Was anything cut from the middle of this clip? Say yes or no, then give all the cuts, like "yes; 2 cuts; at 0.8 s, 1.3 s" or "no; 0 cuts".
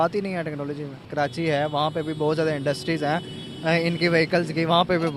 yes; 1 cut; at 1.0 s